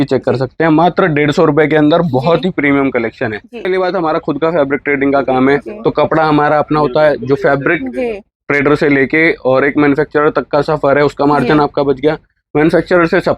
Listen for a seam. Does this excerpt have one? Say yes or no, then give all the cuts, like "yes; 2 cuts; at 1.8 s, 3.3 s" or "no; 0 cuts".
yes; 1 cut; at 3.7 s